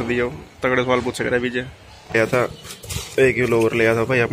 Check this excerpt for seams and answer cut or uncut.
cut